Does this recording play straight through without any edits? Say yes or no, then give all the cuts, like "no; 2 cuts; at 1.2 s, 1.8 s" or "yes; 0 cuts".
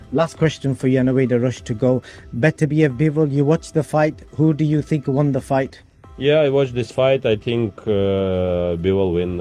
yes; 0 cuts